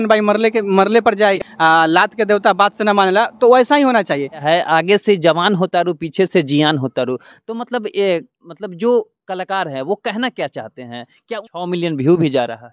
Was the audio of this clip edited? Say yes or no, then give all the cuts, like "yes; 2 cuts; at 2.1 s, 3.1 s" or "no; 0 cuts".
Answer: yes; 3 cuts; at 1.5 s, 4.4 s, 11.4 s